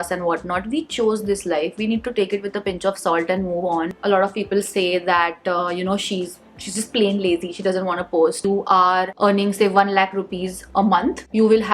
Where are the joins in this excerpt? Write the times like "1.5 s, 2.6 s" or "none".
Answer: 3.9 s, 8.4 s